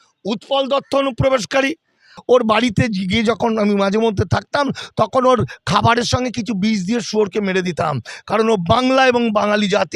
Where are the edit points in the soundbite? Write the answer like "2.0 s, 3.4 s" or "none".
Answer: 2.1 s